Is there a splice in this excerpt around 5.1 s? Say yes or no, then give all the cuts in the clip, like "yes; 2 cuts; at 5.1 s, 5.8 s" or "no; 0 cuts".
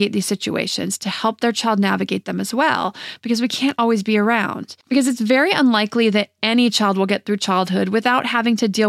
no; 0 cuts